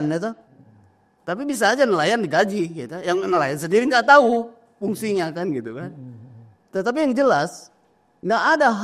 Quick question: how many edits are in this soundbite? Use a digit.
0